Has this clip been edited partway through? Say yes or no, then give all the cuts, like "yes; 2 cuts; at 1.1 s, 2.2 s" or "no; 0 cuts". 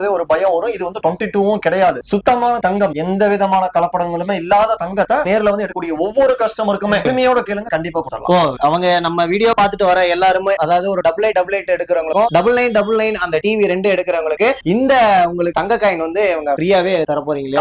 no; 0 cuts